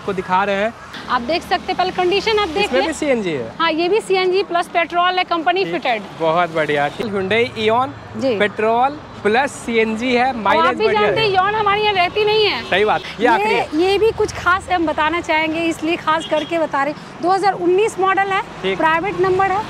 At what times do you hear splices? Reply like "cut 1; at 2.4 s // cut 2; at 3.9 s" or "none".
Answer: cut 1; at 0.9 s // cut 2; at 7.0 s // cut 3; at 13.0 s